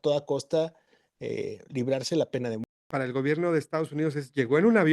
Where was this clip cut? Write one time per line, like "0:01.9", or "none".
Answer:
0:02.9